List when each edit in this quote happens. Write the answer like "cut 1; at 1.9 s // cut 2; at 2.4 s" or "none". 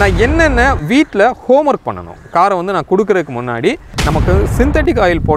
cut 1; at 3.9 s